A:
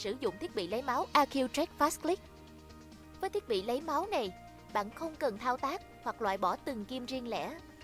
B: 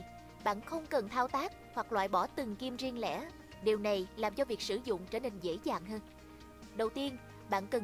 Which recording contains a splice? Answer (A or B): A